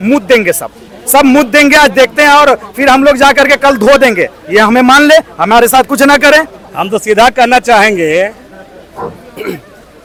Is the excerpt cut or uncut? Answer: uncut